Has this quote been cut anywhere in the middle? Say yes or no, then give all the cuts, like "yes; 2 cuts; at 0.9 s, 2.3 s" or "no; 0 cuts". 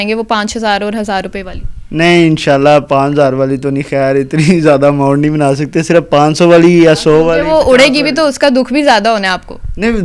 no; 0 cuts